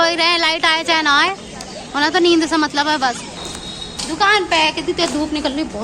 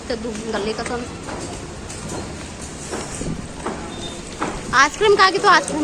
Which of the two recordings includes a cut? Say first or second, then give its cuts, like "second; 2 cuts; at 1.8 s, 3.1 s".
first; 1 cut; at 3.5 s